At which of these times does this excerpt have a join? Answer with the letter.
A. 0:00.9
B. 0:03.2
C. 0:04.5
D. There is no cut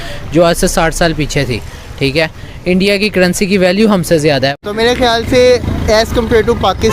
C